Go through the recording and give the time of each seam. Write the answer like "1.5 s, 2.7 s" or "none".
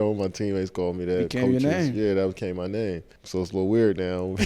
3.1 s